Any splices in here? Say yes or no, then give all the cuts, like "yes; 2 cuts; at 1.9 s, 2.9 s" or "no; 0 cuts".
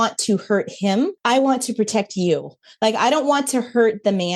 yes; 1 cut; at 1.2 s